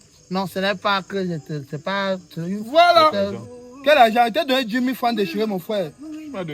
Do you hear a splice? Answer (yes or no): yes